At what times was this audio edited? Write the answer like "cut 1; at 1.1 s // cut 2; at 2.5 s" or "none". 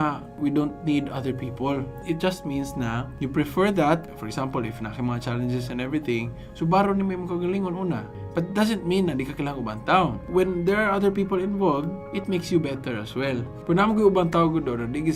none

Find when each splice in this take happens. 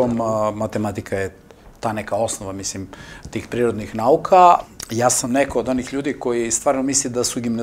cut 1; at 4.7 s

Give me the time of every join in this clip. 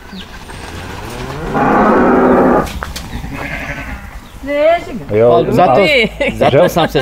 cut 1; at 5.0 s

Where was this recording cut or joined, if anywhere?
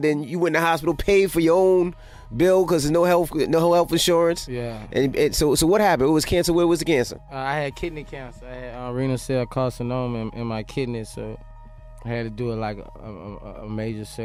none

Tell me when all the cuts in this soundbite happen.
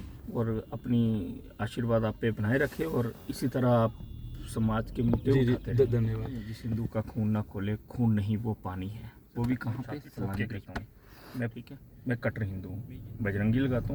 cut 1; at 6.6 s // cut 2; at 10.7 s

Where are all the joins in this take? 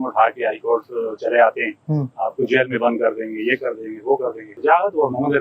cut 1; at 4.5 s

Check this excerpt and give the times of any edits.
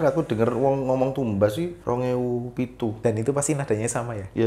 cut 1; at 1.8 s // cut 2; at 3.0 s

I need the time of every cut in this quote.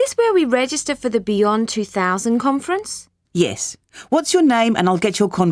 none

